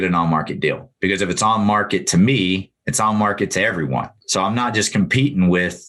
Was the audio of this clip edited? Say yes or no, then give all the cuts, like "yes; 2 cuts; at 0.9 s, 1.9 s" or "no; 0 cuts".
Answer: yes; 1 cut; at 4.2 s